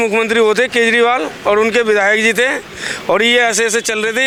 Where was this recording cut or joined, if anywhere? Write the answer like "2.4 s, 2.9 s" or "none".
none